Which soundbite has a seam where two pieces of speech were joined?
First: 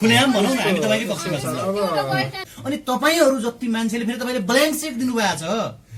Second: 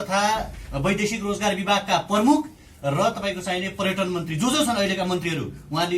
first; 1 cut; at 2.5 s

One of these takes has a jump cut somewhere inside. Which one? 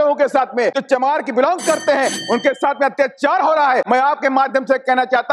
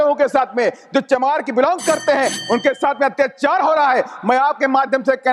first; 2 cuts; at 0.8 s, 3.9 s

